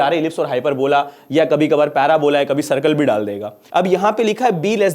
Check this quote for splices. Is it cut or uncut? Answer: cut